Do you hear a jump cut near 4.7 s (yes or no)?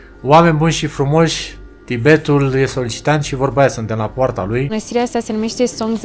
yes